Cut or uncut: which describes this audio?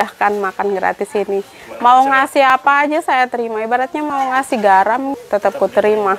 cut